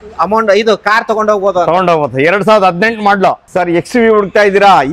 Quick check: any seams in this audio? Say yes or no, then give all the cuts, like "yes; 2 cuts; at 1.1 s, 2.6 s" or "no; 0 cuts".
yes; 1 cut; at 3.4 s